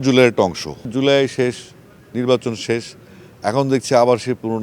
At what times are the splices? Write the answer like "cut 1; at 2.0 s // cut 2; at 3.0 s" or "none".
cut 1; at 0.9 s

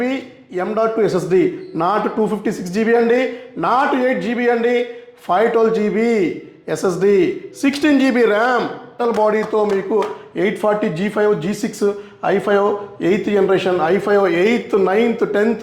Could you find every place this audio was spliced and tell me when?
cut 1; at 9.0 s

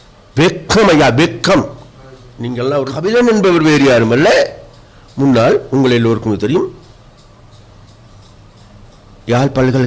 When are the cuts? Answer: cut 1; at 3.0 s

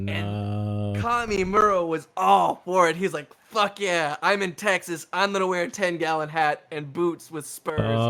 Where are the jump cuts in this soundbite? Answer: none

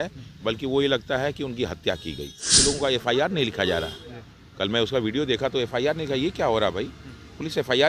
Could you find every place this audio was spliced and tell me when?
cut 1; at 2.6 s

